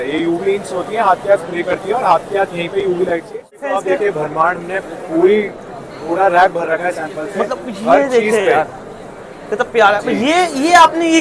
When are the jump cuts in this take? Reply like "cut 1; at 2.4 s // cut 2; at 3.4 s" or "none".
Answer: cut 1; at 3.6 s